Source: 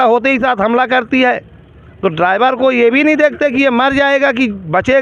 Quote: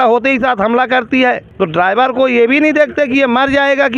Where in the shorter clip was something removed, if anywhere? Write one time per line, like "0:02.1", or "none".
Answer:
0:01.5

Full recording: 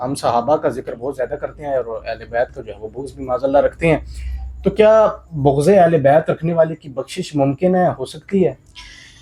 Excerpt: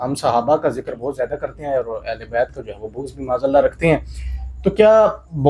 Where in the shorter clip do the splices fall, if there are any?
none

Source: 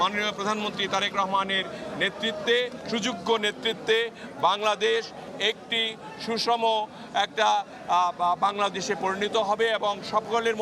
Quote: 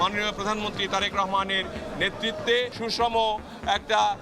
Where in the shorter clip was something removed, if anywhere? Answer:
0:02.7

